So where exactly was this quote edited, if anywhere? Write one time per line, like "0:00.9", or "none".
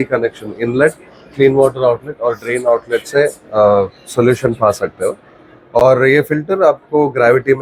none

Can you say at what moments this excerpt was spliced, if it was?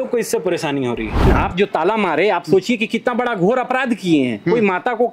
0:01.3

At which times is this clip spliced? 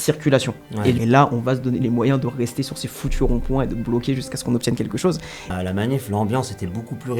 0:01.0
0:05.5

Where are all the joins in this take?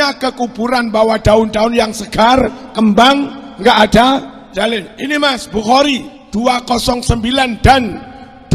0:04.4
0:06.1

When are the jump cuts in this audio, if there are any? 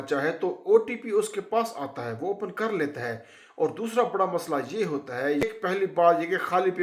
0:05.4

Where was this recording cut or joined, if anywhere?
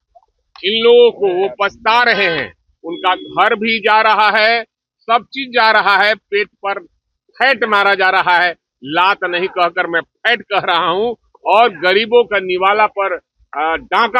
none

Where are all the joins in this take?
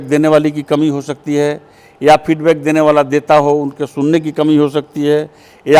none

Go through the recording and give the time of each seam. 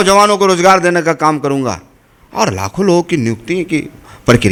none

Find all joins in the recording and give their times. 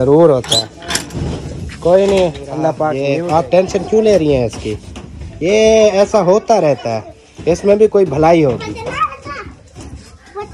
0:03.0

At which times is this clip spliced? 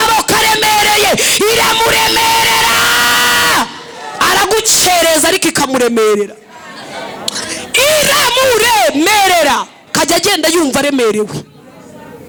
none

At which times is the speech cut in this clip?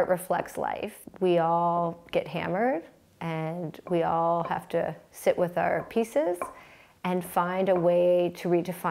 0:00.9

